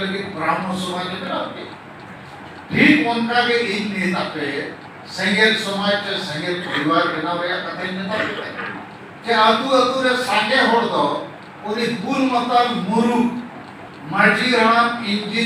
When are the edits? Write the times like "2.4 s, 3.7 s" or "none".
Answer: none